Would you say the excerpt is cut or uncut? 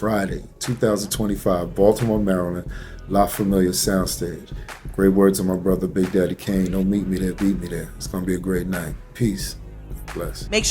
uncut